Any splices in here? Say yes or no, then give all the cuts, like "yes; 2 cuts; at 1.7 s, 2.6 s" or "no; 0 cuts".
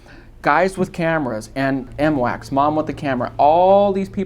yes; 1 cut; at 1.9 s